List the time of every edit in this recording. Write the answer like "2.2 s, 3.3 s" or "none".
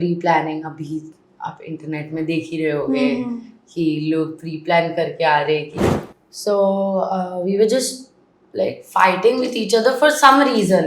5.8 s